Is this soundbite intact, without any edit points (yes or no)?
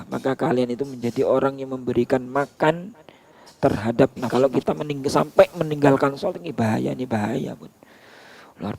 no